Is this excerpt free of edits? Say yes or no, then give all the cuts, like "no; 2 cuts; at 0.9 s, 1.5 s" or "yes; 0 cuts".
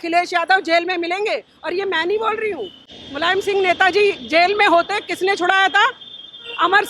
yes; 0 cuts